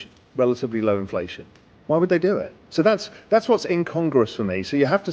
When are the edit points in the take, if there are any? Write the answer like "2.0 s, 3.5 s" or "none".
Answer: 2.6 s